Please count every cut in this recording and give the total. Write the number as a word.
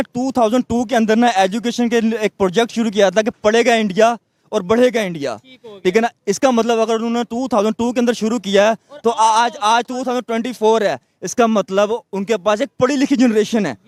zero